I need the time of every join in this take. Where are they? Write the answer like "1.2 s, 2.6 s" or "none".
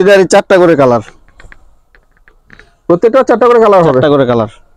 none

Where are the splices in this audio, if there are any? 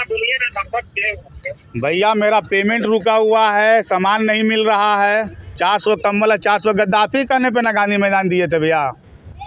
none

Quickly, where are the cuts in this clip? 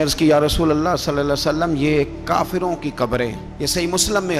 none

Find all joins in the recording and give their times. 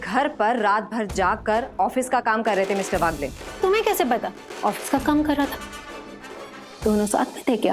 4.4 s

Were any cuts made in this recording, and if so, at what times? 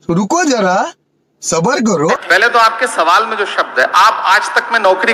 none

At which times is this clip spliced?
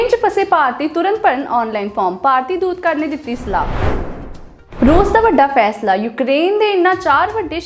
3.6 s, 4.8 s

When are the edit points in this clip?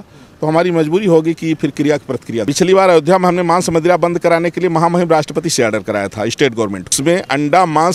2.4 s, 6.9 s

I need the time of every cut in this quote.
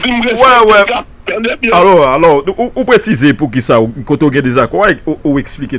none

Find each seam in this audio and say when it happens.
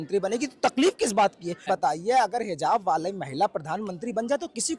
1.7 s

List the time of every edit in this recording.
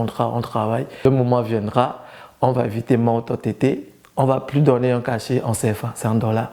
1.0 s

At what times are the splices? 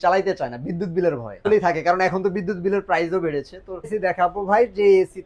1.4 s, 3.9 s

